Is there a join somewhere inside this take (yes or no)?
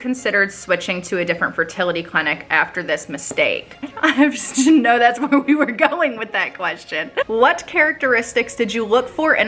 yes